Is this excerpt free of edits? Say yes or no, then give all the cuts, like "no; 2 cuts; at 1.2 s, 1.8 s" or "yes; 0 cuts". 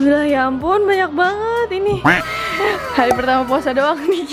yes; 0 cuts